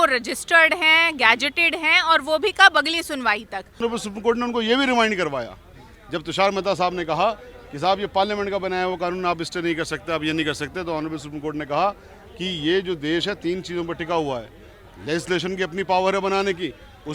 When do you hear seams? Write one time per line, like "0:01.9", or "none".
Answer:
0:03.8